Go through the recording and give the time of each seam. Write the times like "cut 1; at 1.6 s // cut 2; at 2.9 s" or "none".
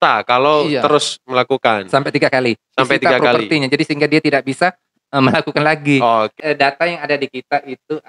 cut 1; at 6.4 s